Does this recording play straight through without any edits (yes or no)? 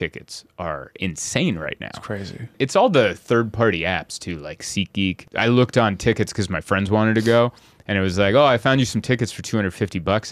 no